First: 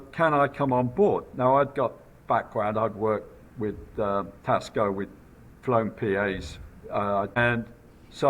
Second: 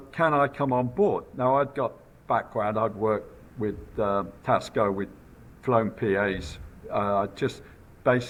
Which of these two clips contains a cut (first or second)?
first